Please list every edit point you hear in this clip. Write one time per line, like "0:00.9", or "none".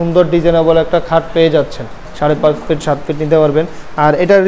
0:02.1

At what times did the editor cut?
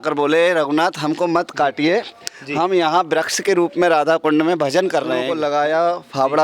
0:05.3

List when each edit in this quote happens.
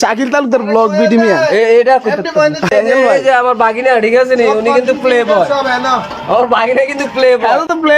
0:02.7

